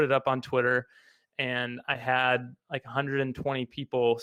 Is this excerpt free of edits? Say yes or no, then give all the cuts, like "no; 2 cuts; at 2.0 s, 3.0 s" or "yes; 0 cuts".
yes; 0 cuts